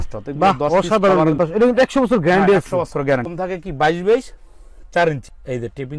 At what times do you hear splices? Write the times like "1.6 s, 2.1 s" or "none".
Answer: 1.4 s, 3.3 s